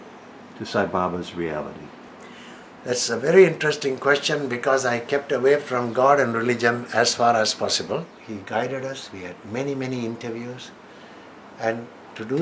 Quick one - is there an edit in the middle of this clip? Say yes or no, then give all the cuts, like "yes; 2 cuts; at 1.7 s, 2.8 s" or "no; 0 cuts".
yes; 1 cut; at 8.2 s